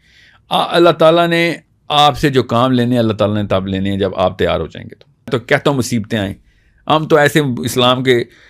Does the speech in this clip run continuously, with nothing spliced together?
no; 1 cut; at 5.3 s

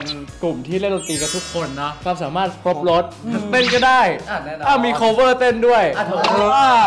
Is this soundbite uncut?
no; 1 cut; at 2.0 s

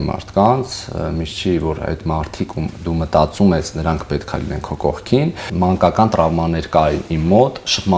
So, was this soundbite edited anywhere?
yes; 1 cut; at 5.4 s

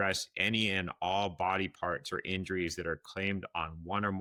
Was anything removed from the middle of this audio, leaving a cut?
no; 0 cuts

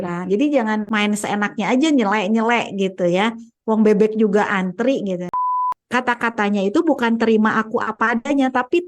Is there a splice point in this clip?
yes; 2 cuts; at 0.9 s, 5.4 s

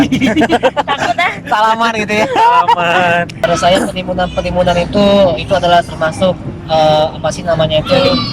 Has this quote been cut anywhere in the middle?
yes; 1 cut; at 3.4 s

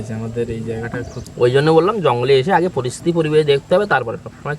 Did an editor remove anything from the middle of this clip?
yes; 1 cut; at 1.2 s

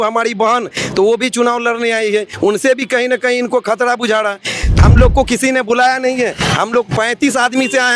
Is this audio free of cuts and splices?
no; 1 cut; at 4.7 s

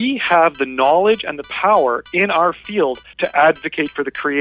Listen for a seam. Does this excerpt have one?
yes; 1 cut; at 3.1 s

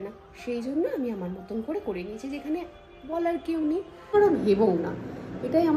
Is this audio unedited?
no; 1 cut; at 4.1 s

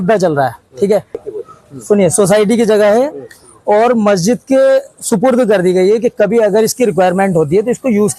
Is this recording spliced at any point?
yes; 1 cut; at 1.2 s

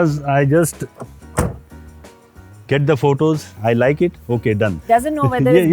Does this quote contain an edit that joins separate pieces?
yes; 2 cuts; at 3.5 s, 4.7 s

